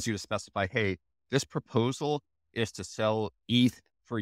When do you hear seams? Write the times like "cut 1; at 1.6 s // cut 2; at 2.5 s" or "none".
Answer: none